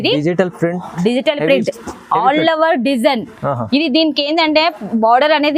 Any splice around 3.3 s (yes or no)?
no